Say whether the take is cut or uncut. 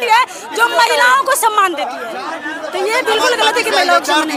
uncut